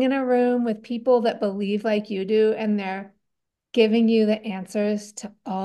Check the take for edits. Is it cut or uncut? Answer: uncut